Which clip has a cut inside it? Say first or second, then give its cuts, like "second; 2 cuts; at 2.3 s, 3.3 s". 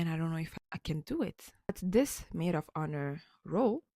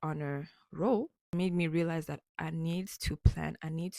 first; 1 cut; at 1.8 s